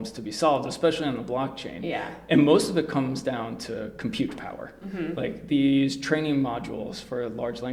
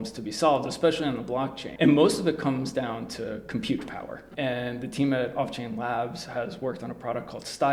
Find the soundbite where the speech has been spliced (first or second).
second